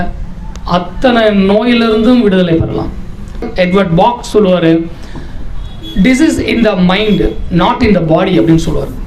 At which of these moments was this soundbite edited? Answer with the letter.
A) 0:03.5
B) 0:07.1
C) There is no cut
A